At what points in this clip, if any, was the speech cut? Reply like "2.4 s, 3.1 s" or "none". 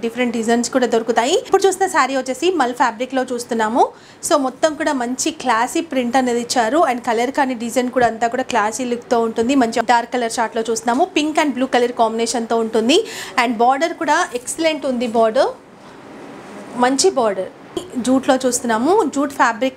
1.5 s, 9.8 s, 17.8 s